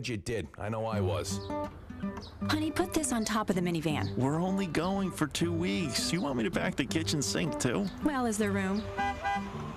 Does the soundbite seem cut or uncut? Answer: uncut